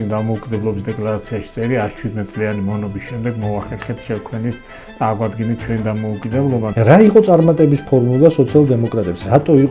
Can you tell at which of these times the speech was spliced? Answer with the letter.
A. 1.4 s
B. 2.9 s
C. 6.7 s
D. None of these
C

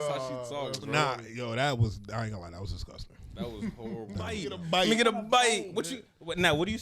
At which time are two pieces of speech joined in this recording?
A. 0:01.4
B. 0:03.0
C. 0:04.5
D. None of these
C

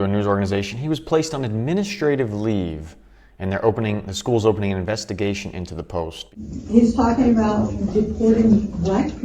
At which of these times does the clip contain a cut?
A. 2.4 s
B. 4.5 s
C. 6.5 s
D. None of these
C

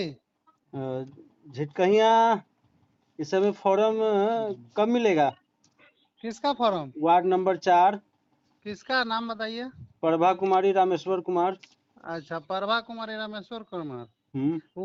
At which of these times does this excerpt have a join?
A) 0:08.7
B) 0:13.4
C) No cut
C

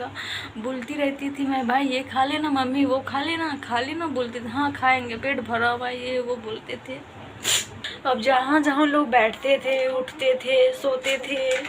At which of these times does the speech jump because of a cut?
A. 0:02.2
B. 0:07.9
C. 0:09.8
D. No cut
B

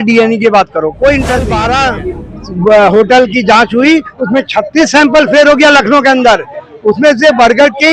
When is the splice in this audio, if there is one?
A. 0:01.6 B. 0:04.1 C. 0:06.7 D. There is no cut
A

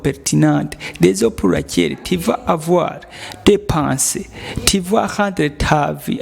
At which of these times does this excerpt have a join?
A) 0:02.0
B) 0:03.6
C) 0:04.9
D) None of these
D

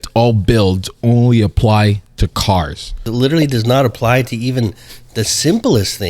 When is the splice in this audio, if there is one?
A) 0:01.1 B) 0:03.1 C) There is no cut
B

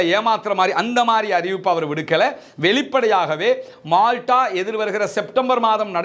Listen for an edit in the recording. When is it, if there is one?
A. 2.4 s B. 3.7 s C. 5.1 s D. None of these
D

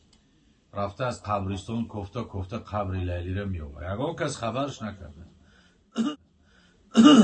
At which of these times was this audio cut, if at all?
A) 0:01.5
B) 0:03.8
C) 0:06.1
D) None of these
C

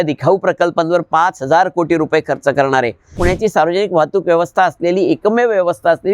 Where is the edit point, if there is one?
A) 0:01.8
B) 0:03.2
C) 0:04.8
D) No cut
B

